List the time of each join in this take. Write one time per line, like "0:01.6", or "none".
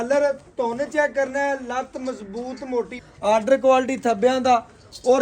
0:03.0